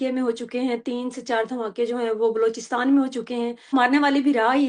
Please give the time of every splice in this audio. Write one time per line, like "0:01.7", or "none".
0:03.7